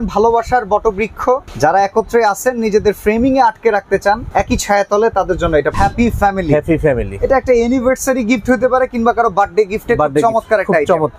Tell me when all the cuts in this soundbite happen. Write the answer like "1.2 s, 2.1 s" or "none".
1.5 s, 4.2 s, 5.7 s